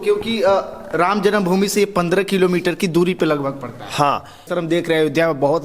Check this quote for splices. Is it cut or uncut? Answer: cut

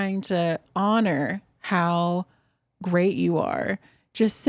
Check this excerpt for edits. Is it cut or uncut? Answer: uncut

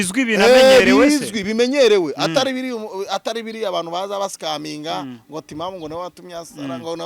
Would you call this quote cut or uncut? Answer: uncut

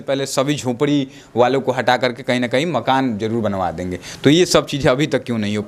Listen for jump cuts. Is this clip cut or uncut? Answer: uncut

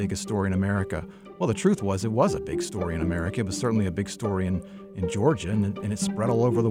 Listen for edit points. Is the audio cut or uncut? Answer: uncut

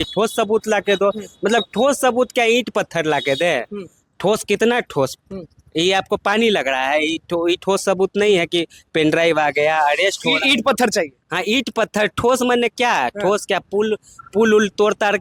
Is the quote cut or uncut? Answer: uncut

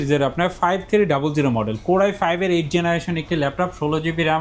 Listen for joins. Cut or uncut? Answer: uncut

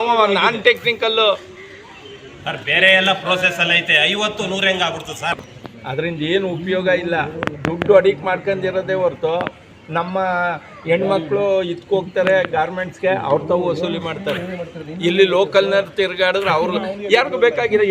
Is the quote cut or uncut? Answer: cut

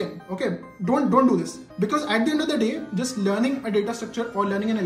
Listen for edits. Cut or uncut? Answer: uncut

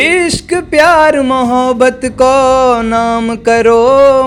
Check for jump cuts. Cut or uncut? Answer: uncut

